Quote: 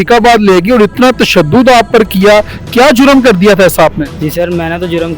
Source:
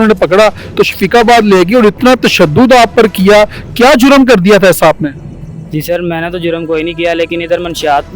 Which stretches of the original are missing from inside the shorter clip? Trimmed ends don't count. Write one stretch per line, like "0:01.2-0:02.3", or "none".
0:05.2-0:05.6